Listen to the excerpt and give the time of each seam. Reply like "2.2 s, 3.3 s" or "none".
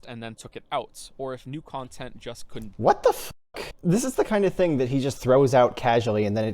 3.2 s